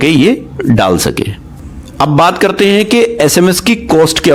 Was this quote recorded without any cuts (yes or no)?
yes